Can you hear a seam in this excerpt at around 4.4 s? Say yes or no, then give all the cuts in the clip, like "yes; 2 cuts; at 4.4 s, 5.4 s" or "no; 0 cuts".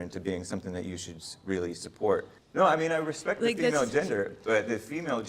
no; 1 cut; at 2.4 s